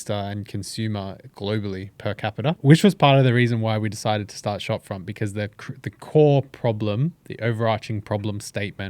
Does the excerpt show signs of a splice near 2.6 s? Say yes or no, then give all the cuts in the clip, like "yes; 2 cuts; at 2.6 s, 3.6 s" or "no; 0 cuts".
yes; 1 cut; at 2.6 s